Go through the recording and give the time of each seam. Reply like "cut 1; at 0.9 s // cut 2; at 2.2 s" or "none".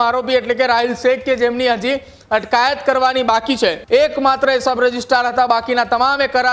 cut 1; at 3.8 s